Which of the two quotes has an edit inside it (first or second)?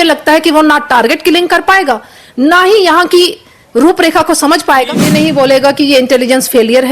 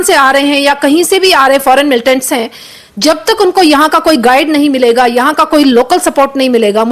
first